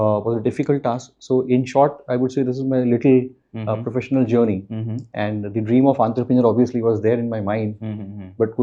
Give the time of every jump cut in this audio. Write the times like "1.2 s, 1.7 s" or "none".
none